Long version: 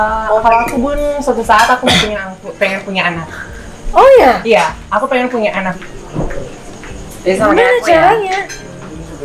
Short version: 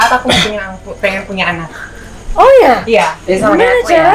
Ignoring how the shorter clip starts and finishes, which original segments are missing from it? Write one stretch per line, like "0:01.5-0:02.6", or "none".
0:04.7-0:07.1